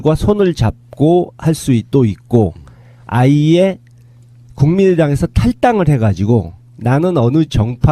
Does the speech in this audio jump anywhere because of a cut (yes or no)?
no